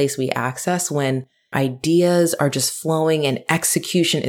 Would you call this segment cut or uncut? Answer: cut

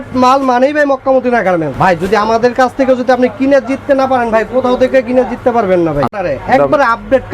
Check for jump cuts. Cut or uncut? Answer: cut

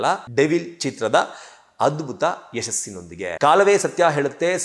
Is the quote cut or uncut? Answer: cut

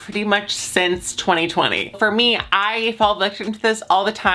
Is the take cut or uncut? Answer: cut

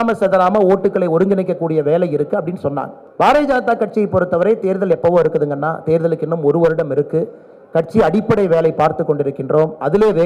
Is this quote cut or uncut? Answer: uncut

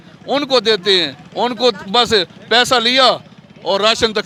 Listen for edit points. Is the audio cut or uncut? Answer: uncut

